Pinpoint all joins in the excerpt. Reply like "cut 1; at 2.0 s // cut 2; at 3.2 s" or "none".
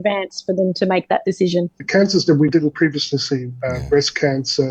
cut 1; at 1.8 s